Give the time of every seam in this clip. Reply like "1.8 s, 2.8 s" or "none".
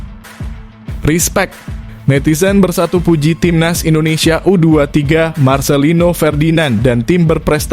1.0 s